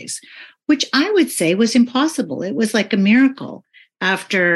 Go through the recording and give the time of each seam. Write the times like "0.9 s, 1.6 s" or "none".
none